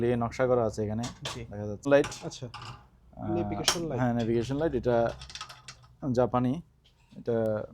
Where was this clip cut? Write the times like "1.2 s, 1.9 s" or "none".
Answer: 1.6 s